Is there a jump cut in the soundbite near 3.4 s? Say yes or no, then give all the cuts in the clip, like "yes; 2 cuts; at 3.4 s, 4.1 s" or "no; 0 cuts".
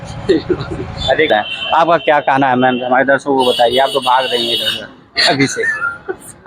no; 1 cut; at 1.3 s